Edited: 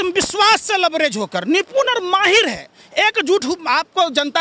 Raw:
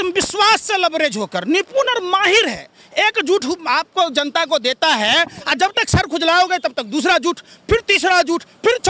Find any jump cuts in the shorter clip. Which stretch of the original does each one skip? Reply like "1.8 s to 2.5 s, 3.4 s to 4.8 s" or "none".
none